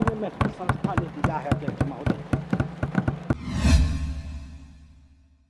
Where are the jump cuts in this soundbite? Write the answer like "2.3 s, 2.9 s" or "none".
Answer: none